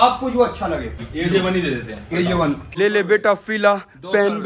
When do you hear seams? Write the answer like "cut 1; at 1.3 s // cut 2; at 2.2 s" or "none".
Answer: cut 1; at 1.1 s // cut 2; at 2.6 s